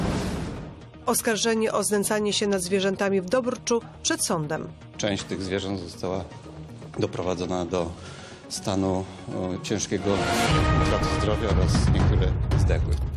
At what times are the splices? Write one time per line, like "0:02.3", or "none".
0:00.9